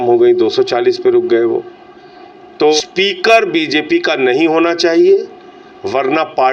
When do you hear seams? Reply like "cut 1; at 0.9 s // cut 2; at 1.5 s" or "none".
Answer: cut 1; at 2.8 s